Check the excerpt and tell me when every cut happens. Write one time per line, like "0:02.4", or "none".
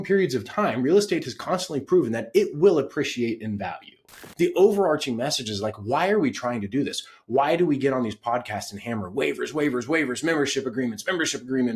0:04.2